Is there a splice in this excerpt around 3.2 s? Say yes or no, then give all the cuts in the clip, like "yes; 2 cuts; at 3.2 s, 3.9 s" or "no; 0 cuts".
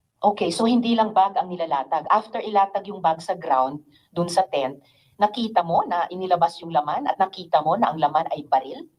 no; 0 cuts